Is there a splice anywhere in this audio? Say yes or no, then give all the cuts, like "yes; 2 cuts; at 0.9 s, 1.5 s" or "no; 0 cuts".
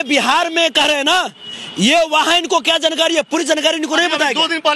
no; 0 cuts